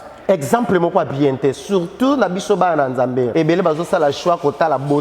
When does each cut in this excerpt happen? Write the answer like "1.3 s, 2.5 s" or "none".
3.3 s